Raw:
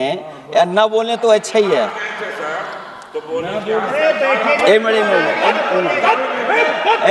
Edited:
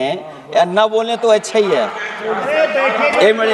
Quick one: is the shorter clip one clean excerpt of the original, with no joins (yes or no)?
no